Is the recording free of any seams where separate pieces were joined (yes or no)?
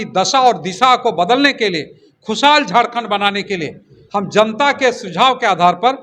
yes